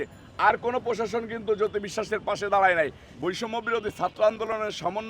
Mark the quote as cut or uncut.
cut